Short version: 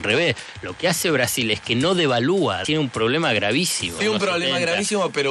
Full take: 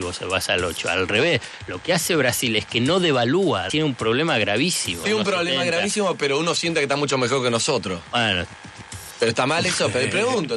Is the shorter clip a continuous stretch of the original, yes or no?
yes